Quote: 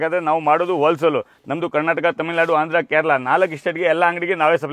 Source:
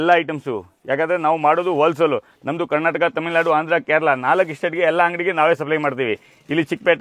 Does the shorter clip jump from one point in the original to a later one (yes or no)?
no